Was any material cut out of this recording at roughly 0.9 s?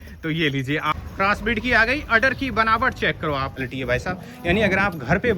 yes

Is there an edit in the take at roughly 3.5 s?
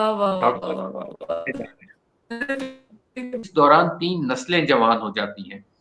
yes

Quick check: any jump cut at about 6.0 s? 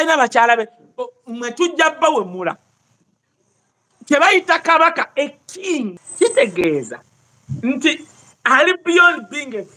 yes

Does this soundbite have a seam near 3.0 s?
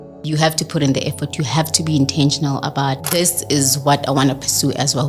yes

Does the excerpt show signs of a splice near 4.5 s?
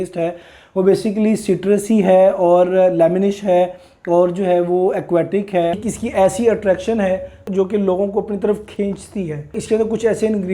no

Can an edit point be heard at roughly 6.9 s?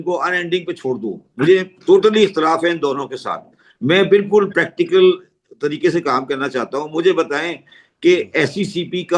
no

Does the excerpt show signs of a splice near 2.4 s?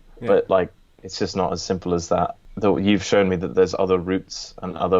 yes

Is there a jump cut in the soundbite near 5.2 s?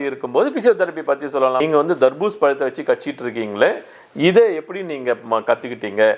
no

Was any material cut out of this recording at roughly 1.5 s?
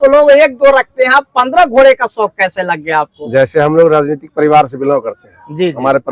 no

